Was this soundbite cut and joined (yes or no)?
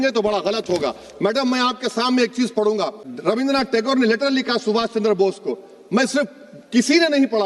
no